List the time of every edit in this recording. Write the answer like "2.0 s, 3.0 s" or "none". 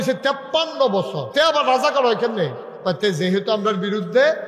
1.2 s